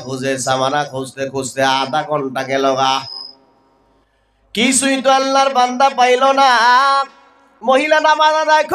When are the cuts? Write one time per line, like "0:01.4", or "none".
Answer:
none